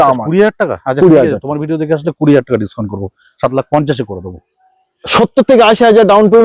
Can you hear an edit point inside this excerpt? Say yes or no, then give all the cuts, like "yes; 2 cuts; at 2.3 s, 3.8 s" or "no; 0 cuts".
no; 0 cuts